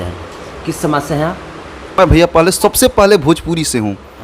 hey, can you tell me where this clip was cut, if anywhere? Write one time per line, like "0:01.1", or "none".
0:02.0